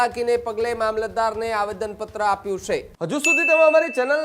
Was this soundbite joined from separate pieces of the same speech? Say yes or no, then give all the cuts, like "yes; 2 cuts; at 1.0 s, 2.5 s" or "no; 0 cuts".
yes; 1 cut; at 2.9 s